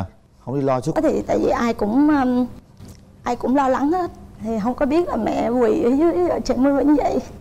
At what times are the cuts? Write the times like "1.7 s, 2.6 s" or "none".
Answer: 1.0 s